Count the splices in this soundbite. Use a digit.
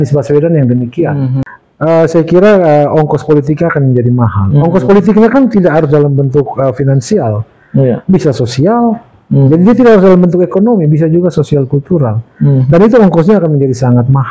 1